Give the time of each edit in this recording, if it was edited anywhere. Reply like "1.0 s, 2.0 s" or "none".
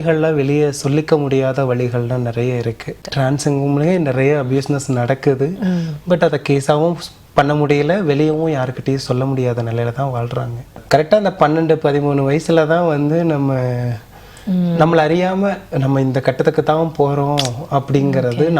3.0 s, 10.8 s